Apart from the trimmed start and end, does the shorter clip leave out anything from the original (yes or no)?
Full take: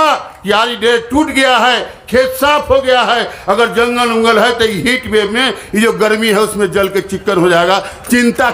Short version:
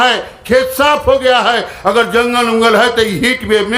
no